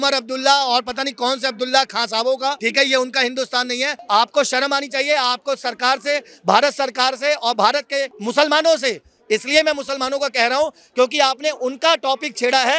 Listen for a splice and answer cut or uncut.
cut